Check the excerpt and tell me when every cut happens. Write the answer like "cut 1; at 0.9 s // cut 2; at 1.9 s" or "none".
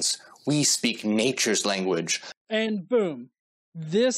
cut 1; at 2.3 s